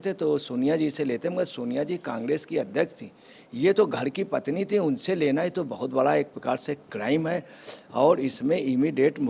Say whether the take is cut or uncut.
uncut